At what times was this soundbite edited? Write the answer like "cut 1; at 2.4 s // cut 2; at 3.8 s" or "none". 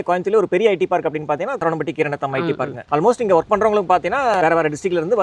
cut 1; at 1.6 s // cut 2; at 2.7 s // cut 3; at 4.4 s